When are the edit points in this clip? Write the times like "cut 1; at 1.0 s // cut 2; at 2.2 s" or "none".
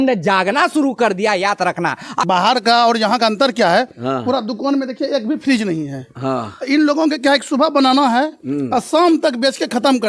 cut 1; at 2.2 s